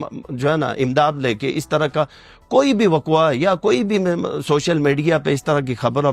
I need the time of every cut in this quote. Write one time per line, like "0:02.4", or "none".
none